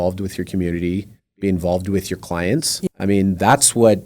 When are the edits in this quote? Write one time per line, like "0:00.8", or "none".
0:02.9